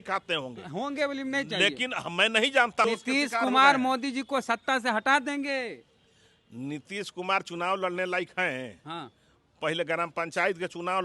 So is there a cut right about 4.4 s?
no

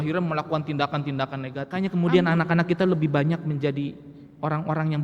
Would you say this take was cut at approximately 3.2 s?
no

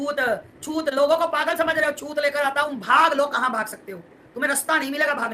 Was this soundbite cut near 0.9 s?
no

